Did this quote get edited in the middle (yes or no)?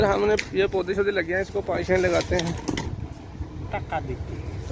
yes